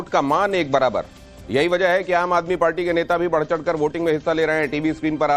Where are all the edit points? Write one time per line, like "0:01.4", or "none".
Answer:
0:02.4